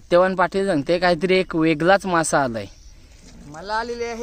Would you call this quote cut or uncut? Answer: uncut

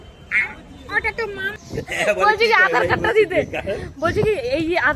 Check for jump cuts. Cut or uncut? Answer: cut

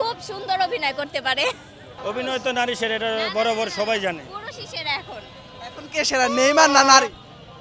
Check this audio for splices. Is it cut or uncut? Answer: uncut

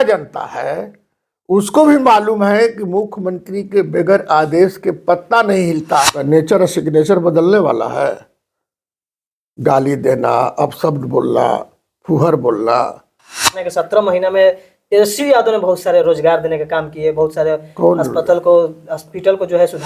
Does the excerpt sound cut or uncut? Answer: cut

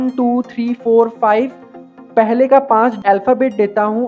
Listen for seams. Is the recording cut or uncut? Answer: cut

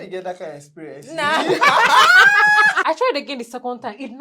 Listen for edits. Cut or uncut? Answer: cut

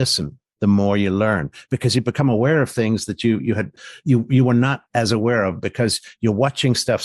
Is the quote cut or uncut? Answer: cut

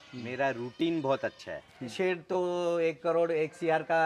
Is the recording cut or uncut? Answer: cut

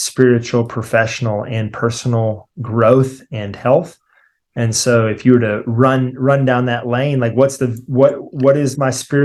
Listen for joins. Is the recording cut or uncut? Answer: uncut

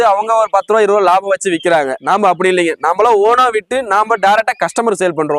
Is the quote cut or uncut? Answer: cut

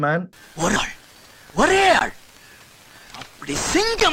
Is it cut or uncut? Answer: uncut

